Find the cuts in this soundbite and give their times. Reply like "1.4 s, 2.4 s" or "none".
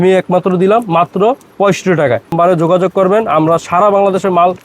2.3 s